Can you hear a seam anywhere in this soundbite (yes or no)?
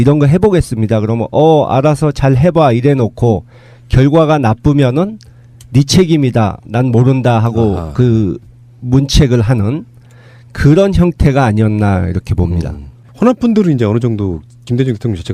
no